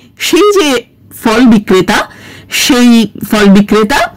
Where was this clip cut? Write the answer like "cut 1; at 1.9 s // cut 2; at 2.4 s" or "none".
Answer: none